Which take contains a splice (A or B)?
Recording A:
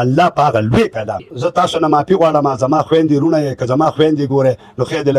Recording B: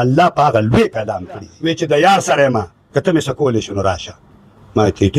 B